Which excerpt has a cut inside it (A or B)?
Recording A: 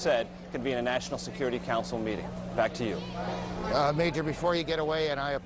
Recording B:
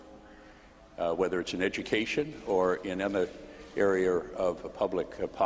B